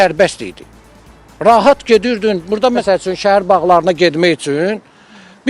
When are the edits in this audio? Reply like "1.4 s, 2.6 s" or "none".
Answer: 2.8 s